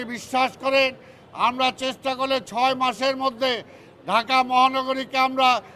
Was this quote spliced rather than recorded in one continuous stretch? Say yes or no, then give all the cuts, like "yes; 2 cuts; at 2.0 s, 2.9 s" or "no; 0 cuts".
no; 0 cuts